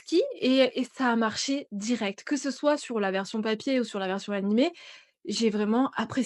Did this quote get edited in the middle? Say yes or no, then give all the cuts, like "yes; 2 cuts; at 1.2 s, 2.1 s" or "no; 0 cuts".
no; 0 cuts